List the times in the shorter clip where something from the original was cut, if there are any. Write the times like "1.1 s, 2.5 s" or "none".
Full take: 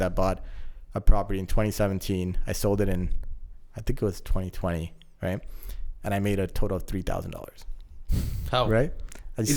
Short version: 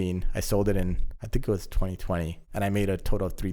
1.1 s, 2.4 s